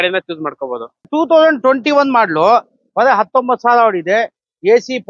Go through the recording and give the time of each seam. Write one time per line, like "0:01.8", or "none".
0:01.1